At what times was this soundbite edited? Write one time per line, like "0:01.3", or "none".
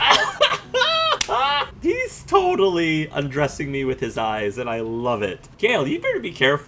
0:01.7
0:05.5